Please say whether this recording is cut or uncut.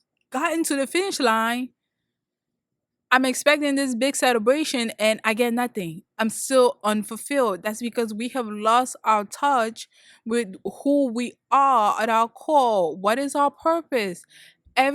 uncut